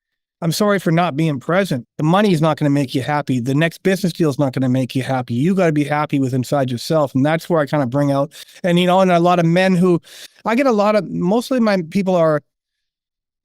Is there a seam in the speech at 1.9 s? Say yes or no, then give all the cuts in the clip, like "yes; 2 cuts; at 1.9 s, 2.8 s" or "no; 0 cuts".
yes; 1 cut; at 1.9 s